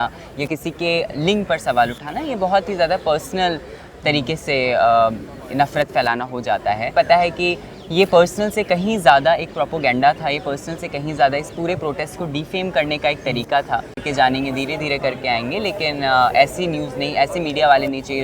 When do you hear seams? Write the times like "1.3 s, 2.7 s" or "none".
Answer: 6.9 s, 14.0 s